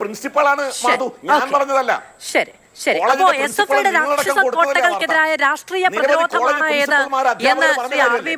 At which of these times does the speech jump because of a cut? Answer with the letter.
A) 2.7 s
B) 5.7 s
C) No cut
C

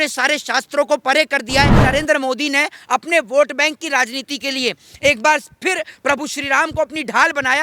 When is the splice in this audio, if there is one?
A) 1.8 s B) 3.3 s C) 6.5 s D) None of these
A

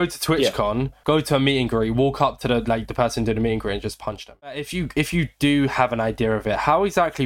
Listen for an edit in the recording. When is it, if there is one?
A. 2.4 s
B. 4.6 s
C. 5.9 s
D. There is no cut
B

